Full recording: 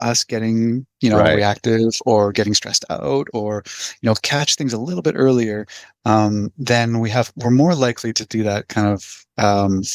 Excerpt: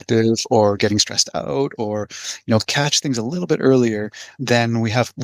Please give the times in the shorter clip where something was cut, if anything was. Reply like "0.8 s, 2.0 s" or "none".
4.3 s